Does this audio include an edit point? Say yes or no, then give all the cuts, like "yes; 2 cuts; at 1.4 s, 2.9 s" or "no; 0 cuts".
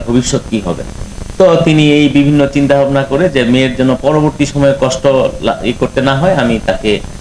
no; 0 cuts